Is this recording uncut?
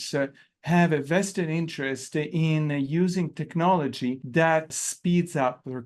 no; 1 cut; at 4.6 s

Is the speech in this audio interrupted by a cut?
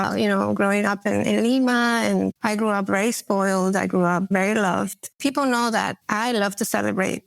yes; 3 cuts; at 2.4 s, 5.2 s, 6.0 s

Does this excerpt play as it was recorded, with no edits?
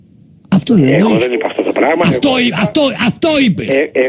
no; 1 cut; at 1.4 s

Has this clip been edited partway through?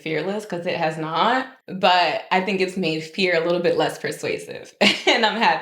yes; 1 cut; at 1.6 s

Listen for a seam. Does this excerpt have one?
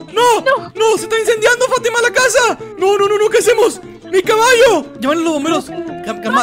no; 0 cuts

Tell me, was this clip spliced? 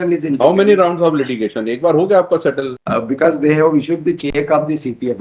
yes; 1 cut; at 2.7 s

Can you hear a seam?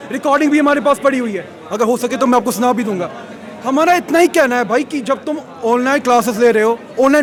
no; 0 cuts

